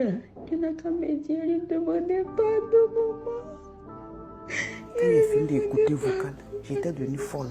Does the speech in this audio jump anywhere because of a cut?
no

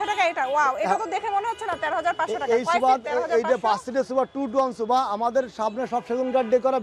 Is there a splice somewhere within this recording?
no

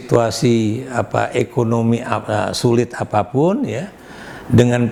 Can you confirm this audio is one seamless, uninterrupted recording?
yes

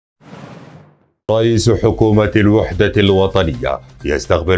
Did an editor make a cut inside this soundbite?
yes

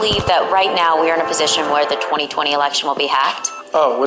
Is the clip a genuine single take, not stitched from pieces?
yes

